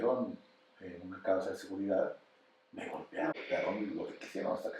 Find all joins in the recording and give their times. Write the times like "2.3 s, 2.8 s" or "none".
3.3 s